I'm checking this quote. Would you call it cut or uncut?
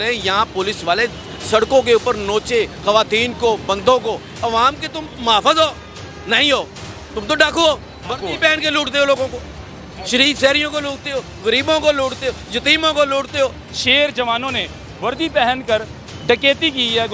cut